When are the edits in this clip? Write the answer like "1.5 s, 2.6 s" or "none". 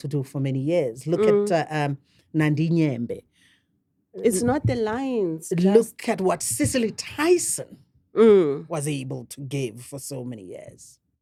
none